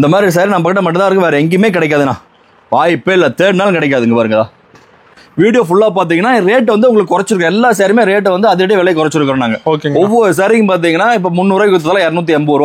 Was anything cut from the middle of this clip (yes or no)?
yes